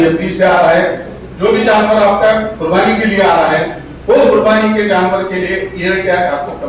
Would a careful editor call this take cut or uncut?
uncut